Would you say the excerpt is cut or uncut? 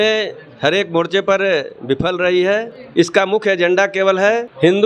cut